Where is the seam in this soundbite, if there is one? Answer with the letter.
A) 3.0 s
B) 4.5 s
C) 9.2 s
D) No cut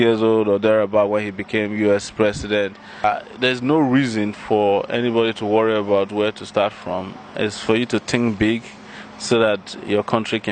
A